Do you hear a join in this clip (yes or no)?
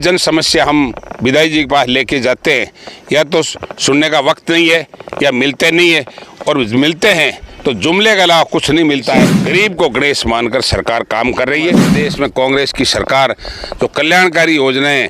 yes